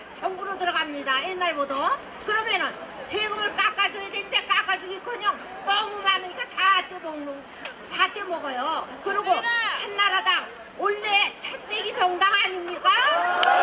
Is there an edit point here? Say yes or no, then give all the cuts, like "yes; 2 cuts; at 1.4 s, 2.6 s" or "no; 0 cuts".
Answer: yes; 1 cut; at 9.0 s